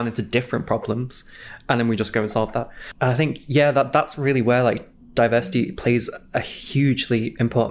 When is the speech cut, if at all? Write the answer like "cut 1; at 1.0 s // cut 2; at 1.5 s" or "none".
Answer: cut 1; at 2.8 s // cut 2; at 6.6 s

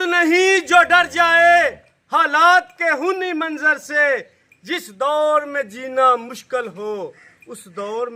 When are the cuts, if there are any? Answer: none

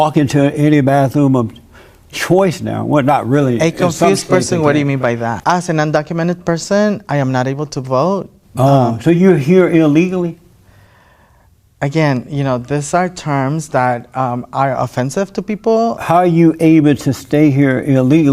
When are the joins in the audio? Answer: cut 1; at 5.4 s

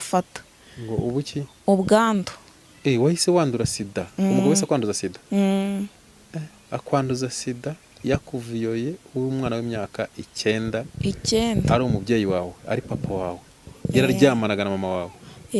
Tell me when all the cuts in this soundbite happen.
none

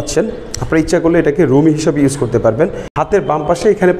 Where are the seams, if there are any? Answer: cut 1; at 2.9 s

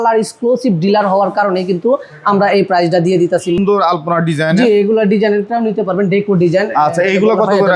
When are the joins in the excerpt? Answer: cut 1; at 3.6 s

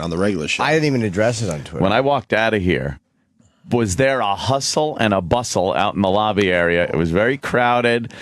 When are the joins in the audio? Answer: cut 1; at 2.5 s

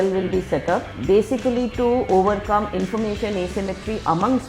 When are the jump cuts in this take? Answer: cut 1; at 0.9 s

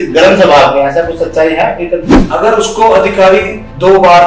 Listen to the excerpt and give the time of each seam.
cut 1; at 2.2 s

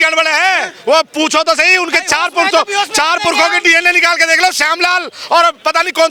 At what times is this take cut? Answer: none

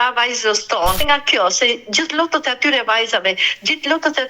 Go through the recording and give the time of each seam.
cut 1; at 1.0 s

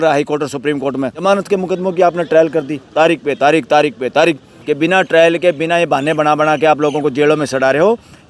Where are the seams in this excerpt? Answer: cut 1; at 1.2 s // cut 2; at 4.5 s

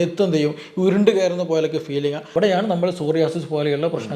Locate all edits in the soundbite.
cut 1; at 2.2 s

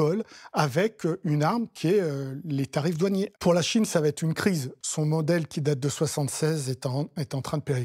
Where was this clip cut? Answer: cut 1; at 3.3 s // cut 2; at 4.8 s

